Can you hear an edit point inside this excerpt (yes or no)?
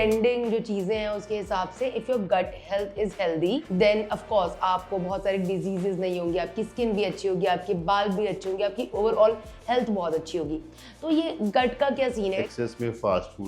yes